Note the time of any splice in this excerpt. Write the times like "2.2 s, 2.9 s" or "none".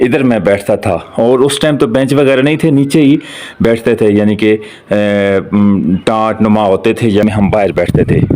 7.2 s